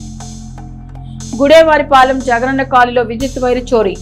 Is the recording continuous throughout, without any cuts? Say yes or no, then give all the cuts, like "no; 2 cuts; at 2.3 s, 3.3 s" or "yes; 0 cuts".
yes; 0 cuts